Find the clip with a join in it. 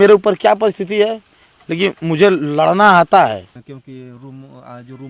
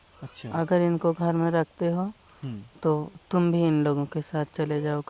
first; 1 cut; at 3.6 s

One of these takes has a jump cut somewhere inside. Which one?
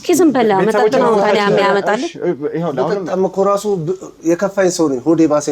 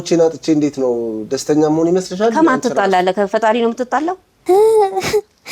second; 1 cut; at 4.3 s

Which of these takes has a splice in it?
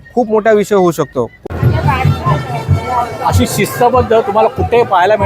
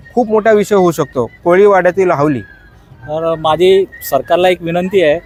first; 1 cut; at 1.5 s

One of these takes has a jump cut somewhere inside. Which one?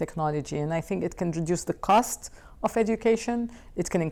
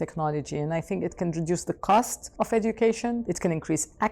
second; 2 cuts; at 2.2 s, 3.3 s

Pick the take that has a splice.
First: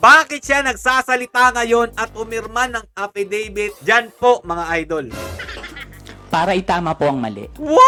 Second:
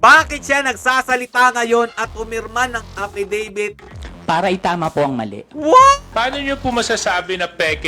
second; 2 cuts; at 3.8 s, 6.1 s

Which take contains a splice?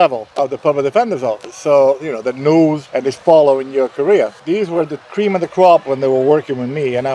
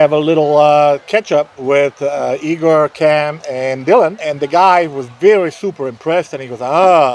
first; 1 cut; at 4.4 s

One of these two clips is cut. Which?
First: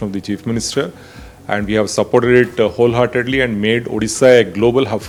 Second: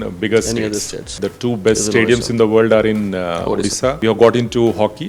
second; 2 cuts; at 1.2 s, 4.0 s

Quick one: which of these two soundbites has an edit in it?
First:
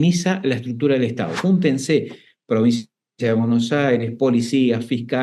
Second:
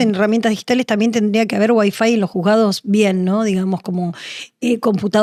first; 1 cut; at 1.4 s

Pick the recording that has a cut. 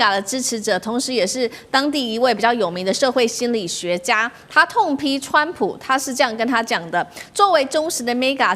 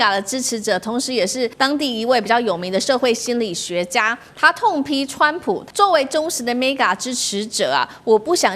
second; 2 cuts; at 1.5 s, 5.6 s

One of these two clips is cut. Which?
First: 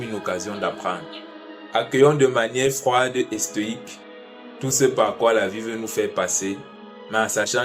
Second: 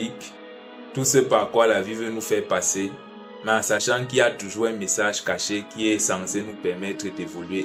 first; 1 cut; at 1.6 s

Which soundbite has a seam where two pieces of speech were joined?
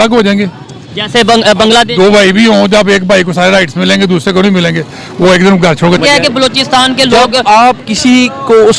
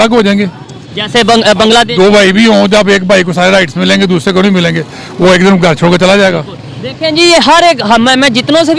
first; 1 cut; at 6.0 s

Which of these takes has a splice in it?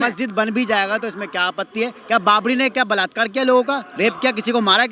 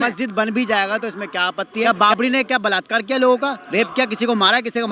second; 1 cut; at 1.8 s

